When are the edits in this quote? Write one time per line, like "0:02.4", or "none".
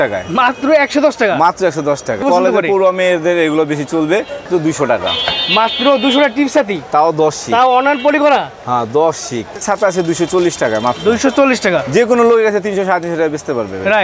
0:02.2
0:04.5
0:09.5